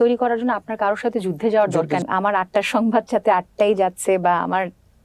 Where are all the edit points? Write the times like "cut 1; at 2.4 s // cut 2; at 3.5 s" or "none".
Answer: cut 1; at 2.0 s